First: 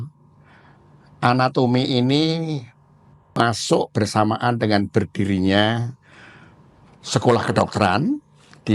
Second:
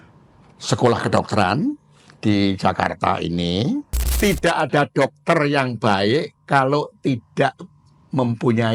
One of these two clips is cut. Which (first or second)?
second